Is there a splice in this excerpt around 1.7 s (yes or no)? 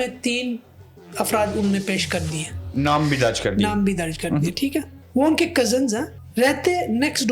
no